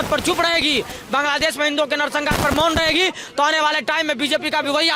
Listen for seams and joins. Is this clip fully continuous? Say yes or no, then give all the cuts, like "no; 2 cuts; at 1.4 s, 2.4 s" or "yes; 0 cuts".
yes; 0 cuts